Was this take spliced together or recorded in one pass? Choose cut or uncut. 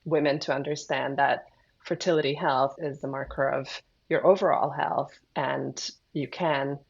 cut